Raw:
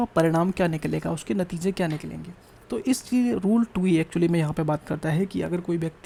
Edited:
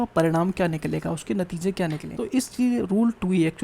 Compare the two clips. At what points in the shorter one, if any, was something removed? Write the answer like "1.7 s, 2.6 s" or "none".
2.1 s